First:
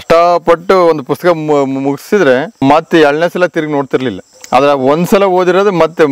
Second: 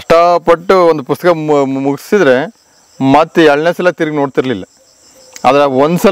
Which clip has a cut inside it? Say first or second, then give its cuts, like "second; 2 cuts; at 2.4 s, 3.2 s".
first; 2 cuts; at 2.5 s, 4.3 s